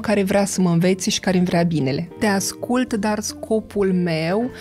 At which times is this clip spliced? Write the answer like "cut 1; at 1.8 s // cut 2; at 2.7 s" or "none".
cut 1; at 2.1 s